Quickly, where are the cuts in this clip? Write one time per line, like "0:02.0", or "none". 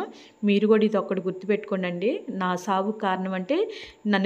none